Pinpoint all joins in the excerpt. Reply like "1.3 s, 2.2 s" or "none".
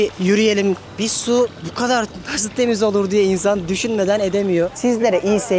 1.2 s, 4.7 s